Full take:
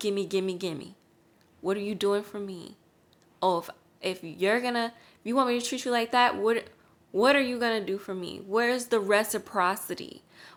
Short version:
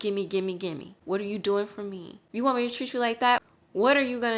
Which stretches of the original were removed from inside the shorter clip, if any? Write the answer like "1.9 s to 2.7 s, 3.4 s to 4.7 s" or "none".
0.9 s to 1.5 s, 2.7 s to 5.1 s, 6.4 s to 6.8 s